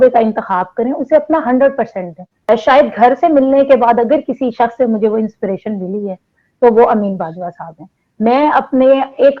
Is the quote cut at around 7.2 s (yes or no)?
no